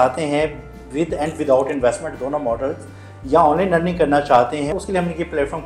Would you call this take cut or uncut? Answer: cut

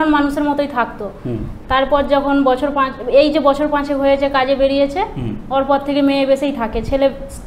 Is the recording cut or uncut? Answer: uncut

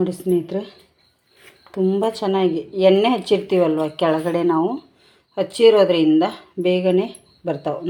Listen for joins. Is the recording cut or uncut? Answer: uncut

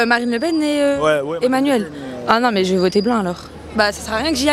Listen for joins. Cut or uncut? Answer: uncut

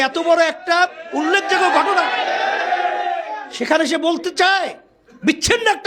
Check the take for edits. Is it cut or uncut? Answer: uncut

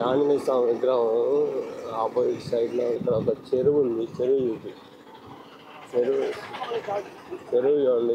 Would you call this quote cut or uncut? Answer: cut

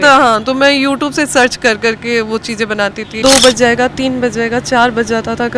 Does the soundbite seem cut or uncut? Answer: cut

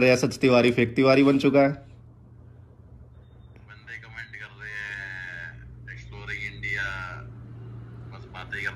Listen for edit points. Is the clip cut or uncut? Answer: uncut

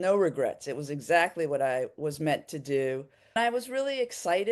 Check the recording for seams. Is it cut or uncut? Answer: cut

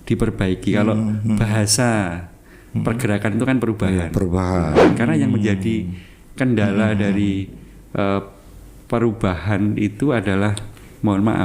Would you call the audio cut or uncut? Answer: cut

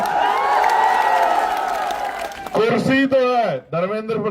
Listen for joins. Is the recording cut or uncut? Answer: cut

